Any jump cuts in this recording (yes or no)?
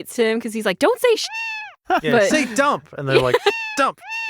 yes